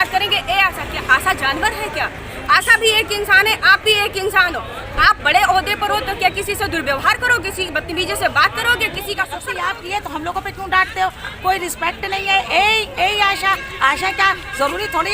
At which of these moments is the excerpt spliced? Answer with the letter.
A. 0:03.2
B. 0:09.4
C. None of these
B